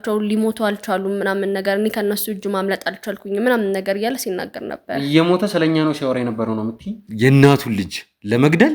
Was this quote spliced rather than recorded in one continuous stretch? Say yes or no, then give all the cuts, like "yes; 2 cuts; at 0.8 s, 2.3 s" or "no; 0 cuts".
yes; 1 cut; at 7.1 s